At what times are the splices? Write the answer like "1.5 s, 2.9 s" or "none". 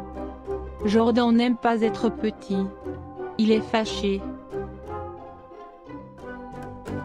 4.2 s